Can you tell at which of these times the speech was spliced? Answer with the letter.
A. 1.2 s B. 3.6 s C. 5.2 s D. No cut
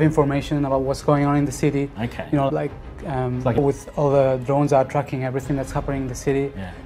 B